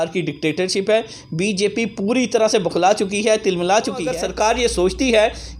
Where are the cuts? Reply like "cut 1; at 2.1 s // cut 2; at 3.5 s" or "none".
cut 1; at 4.2 s